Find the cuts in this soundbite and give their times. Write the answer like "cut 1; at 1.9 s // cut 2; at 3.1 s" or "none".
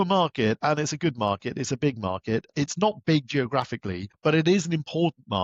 cut 1; at 2.5 s // cut 2; at 4.0 s